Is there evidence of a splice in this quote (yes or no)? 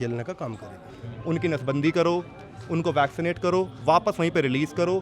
yes